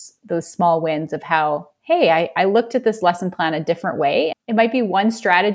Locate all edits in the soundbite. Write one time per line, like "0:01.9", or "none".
0:04.4